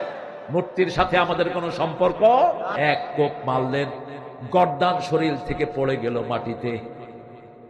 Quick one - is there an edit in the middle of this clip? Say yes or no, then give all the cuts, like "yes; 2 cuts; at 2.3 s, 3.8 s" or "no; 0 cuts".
yes; 1 cut; at 2.7 s